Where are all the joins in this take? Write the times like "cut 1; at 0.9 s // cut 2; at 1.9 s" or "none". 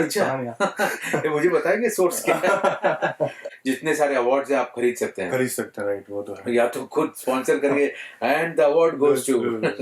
cut 1; at 3.4 s